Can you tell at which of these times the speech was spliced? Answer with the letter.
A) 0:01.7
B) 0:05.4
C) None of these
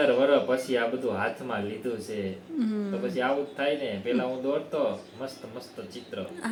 C